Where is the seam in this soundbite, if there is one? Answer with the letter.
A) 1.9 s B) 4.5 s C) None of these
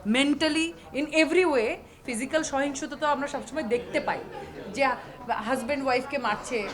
A